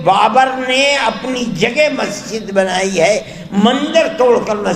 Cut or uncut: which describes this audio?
uncut